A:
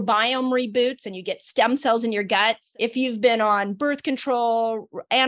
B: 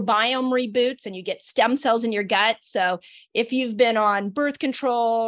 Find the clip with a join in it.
A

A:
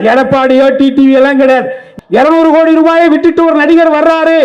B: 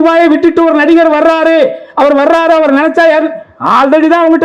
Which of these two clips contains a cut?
A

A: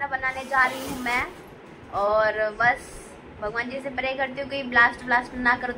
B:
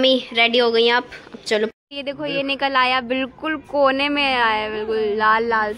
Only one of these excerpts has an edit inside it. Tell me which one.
B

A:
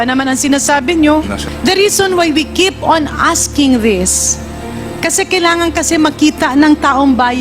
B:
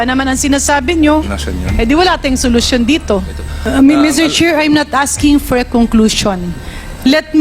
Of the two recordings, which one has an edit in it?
A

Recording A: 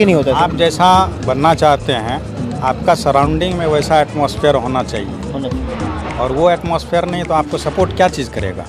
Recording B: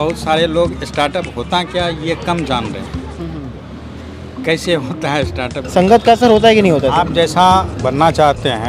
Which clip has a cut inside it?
B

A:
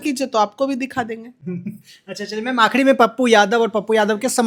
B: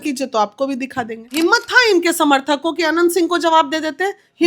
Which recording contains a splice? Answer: B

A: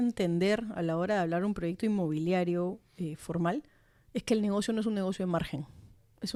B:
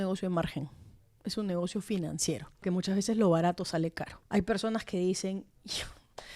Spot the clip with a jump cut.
B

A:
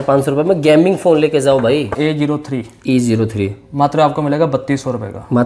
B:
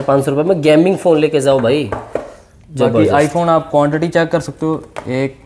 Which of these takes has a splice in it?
A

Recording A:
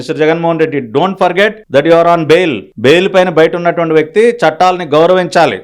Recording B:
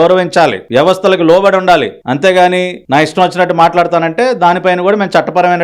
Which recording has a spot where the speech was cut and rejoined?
A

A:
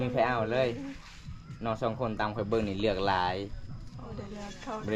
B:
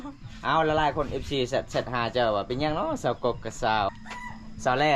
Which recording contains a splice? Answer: B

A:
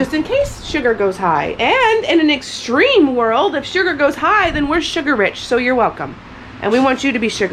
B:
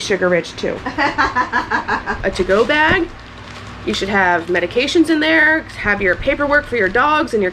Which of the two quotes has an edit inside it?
B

